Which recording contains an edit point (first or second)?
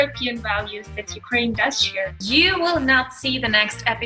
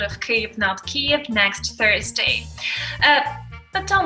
first